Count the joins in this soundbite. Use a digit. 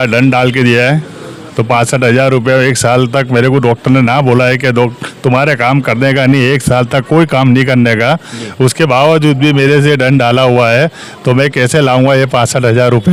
0